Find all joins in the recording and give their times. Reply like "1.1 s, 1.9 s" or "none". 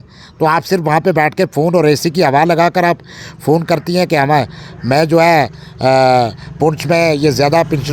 none